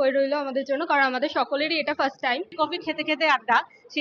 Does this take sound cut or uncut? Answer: cut